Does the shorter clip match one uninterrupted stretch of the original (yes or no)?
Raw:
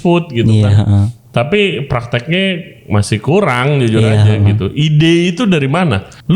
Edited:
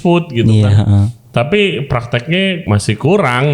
no